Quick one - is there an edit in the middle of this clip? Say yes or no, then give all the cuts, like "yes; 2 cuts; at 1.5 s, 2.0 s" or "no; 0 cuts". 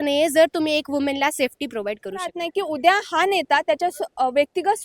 yes; 1 cut; at 2.4 s